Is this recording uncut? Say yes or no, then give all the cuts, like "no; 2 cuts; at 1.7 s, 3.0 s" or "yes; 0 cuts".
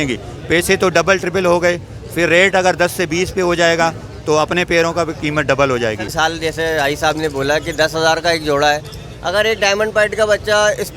no; 1 cut; at 6.1 s